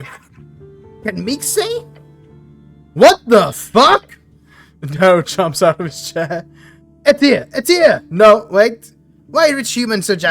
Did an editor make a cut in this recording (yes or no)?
no